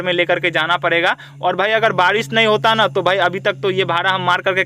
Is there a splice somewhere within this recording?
no; 0 cuts

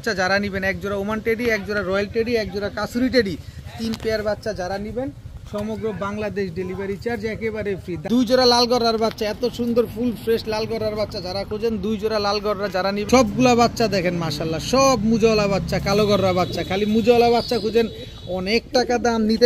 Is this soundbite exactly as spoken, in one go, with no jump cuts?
no; 2 cuts; at 8.0 s, 13.0 s

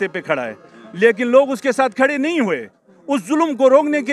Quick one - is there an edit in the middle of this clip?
no; 0 cuts

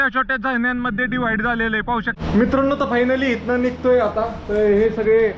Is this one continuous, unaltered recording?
no; 1 cut; at 2.1 s

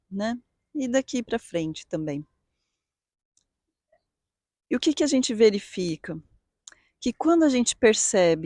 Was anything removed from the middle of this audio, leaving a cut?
no; 0 cuts

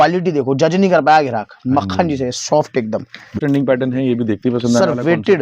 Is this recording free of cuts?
no; 1 cut; at 3.3 s

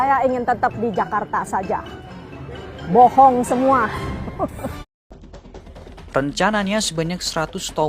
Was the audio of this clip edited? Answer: yes; 1 cut; at 4.9 s

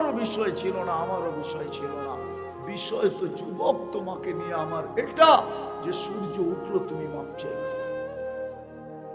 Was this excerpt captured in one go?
no; 1 cut; at 7.6 s

